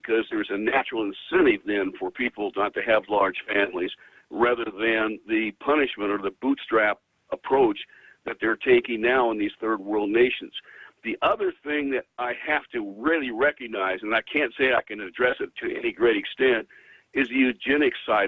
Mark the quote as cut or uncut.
cut